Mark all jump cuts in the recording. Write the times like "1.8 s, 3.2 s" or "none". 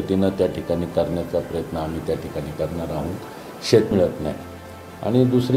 3.9 s